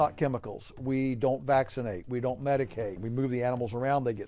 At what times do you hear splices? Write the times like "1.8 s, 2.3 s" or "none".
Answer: 3.0 s

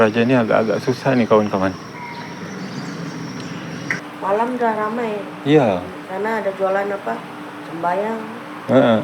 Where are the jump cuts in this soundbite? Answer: 4.0 s

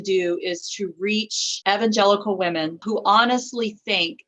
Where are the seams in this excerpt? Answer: 1.4 s, 2.8 s

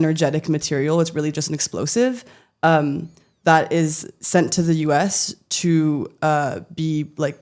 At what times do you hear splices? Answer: none

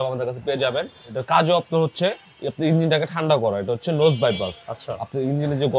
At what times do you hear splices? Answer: 1.2 s

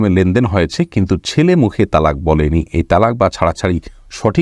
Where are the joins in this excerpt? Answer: none

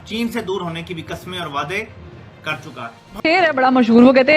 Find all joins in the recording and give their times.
3.0 s

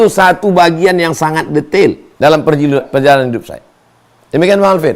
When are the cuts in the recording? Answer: 2.1 s

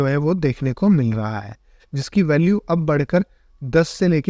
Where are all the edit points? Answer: none

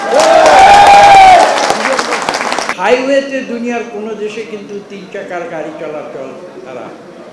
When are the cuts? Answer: 2.7 s

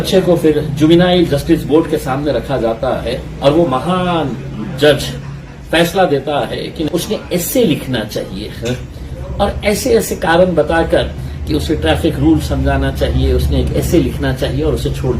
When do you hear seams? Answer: 6.8 s

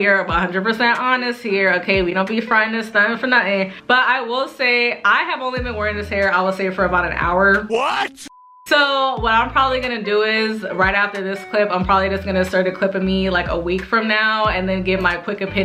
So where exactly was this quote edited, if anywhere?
none

